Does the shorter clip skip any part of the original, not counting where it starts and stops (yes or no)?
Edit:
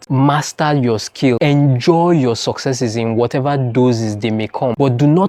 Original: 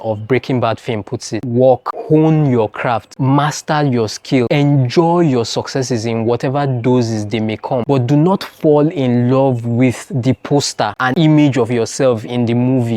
no